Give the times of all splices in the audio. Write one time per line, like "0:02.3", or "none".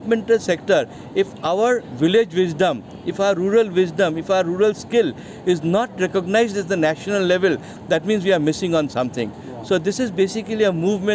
none